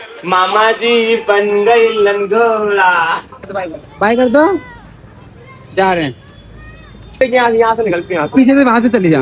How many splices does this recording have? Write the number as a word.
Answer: two